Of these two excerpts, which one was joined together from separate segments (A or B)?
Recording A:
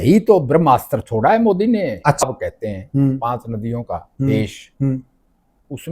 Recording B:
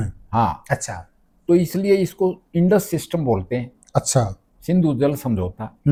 A